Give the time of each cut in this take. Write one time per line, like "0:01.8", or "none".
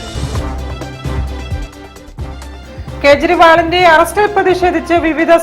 0:02.5